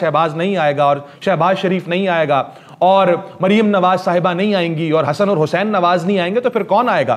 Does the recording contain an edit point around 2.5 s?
no; 0 cuts

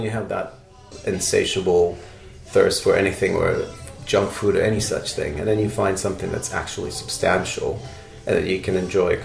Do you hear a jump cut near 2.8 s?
no; 1 cut; at 0.9 s

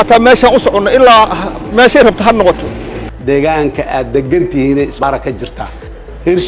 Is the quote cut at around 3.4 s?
yes; 1 cut; at 3.4 s

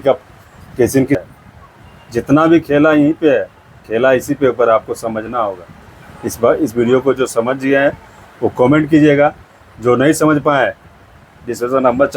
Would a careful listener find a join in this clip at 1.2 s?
yes; 1 cut; at 1.2 s

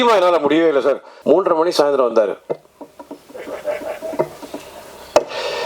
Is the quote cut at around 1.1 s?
yes; 1 cut; at 1.1 s

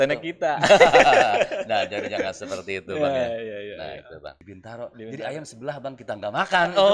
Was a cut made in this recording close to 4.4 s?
yes; 1 cut; at 4.4 s

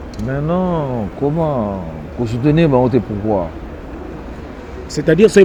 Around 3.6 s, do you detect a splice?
no; 0 cuts

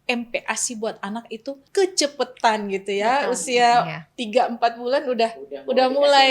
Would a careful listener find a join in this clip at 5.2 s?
no; 1 cut; at 1.6 s

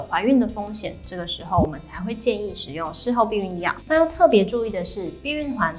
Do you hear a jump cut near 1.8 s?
no; 1 cut; at 3.7 s

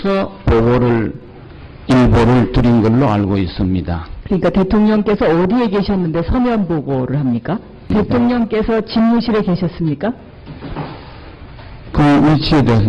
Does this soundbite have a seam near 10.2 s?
no; 0 cuts

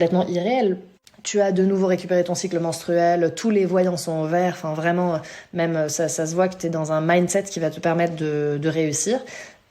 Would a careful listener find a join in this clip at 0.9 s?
yes; 1 cut; at 0.9 s

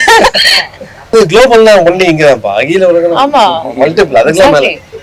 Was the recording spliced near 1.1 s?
yes; 1 cut; at 1.1 s

